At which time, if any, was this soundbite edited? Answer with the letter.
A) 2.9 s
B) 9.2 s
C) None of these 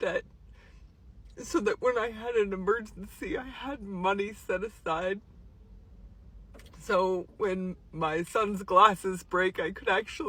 C